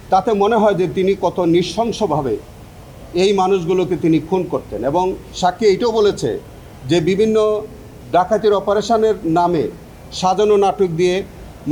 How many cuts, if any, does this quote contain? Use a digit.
0